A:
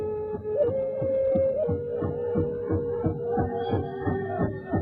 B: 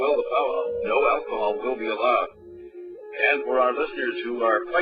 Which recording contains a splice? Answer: B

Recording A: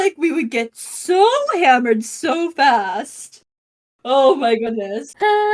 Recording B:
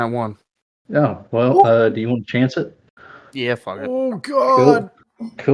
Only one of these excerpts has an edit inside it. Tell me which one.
A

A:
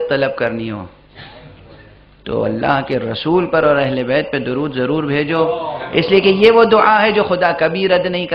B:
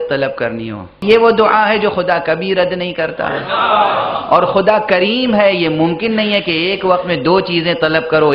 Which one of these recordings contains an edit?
B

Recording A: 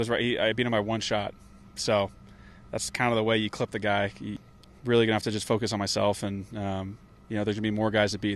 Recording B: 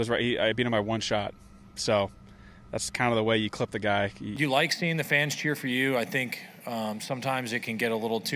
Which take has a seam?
B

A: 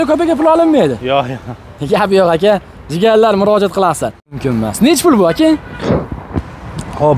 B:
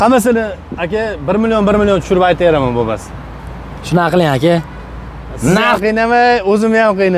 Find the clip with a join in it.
A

